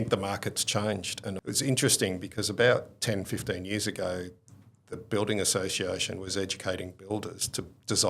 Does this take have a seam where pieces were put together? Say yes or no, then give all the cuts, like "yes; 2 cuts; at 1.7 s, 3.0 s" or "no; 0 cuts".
yes; 1 cut; at 1.4 s